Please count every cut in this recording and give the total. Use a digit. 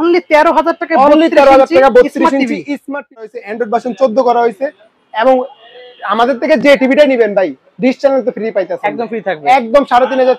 1